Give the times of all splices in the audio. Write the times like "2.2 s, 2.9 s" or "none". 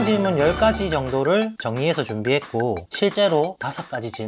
2.9 s